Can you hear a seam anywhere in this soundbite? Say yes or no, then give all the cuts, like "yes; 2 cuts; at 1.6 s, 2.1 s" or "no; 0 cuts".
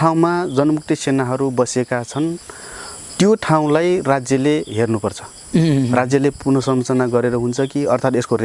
no; 0 cuts